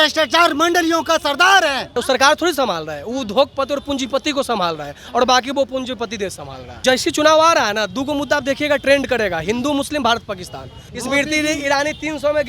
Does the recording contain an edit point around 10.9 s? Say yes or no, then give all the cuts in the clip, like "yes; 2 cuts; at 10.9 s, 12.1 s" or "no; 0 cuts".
yes; 3 cuts; at 1.9 s, 6.8 s, 10.9 s